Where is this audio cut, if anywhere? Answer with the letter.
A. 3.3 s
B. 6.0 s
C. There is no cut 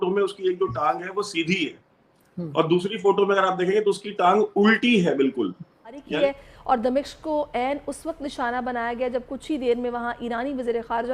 B